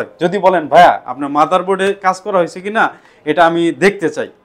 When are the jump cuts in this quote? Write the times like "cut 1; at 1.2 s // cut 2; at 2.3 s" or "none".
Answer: none